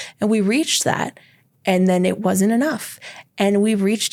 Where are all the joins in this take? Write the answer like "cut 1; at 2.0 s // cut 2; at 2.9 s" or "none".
none

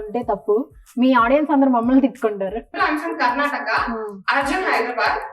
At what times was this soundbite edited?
cut 1; at 2.7 s

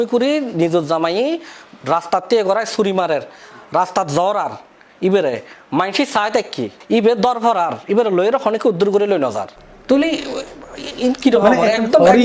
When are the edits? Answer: none

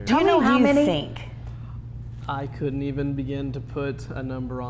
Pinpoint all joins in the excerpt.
none

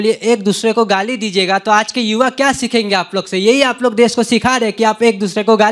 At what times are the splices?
none

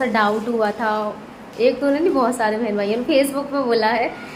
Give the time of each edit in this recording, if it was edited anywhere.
none

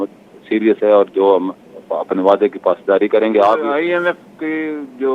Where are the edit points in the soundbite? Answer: cut 1; at 3.6 s

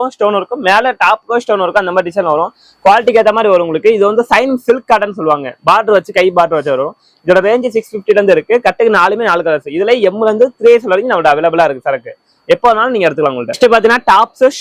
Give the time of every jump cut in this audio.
none

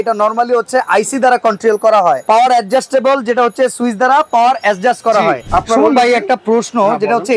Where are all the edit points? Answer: cut 1; at 5.4 s

